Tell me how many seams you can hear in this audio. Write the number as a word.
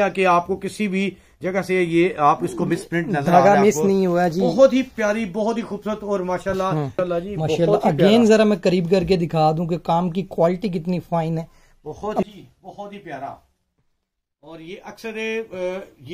two